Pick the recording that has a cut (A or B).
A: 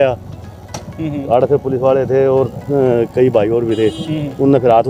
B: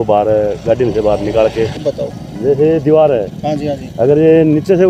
B